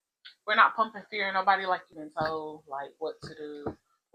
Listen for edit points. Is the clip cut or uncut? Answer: cut